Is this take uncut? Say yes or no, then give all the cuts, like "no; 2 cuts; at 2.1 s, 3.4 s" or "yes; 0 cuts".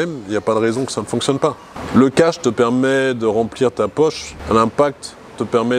no; 2 cuts; at 1.7 s, 4.3 s